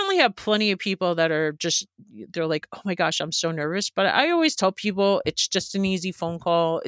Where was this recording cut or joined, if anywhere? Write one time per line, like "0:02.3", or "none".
none

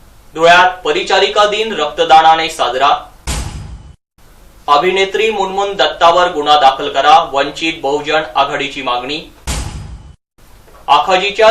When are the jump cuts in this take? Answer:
none

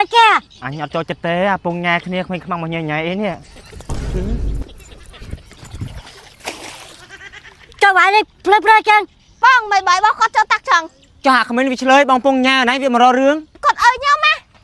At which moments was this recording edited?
0:13.6

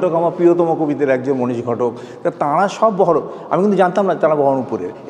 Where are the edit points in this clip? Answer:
none

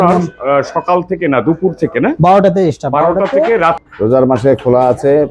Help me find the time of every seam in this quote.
0:03.8

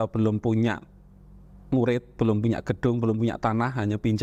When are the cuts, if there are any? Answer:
none

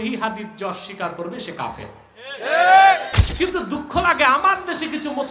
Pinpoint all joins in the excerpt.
0:03.2

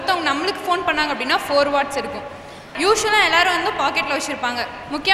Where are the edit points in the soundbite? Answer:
0:02.7

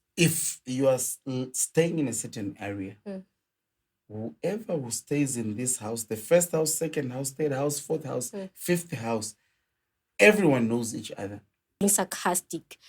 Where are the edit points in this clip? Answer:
0:11.8

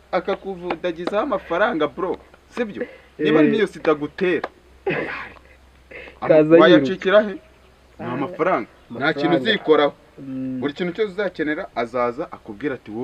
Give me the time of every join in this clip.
none

